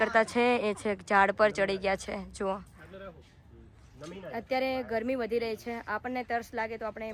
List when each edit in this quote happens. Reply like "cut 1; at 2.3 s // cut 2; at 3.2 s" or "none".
none